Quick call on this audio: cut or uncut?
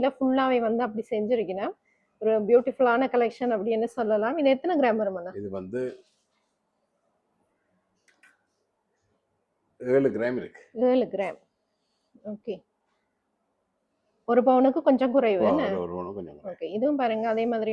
uncut